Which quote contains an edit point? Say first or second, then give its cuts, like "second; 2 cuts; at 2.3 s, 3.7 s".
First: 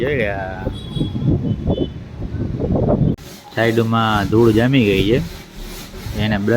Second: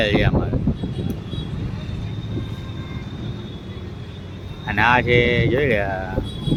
first; 1 cut; at 3.2 s